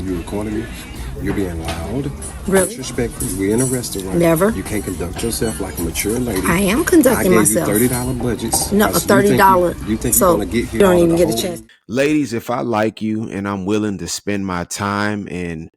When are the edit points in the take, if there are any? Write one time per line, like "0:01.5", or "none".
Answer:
0:11.4